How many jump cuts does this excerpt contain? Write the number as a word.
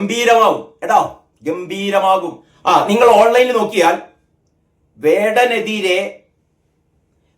one